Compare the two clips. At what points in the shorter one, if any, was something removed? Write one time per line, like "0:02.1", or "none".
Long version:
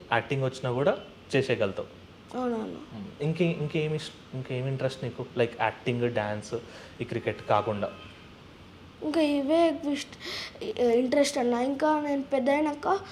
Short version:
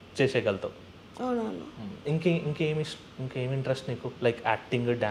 none